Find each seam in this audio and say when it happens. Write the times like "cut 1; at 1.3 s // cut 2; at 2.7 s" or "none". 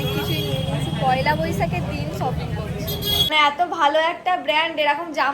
cut 1; at 3.3 s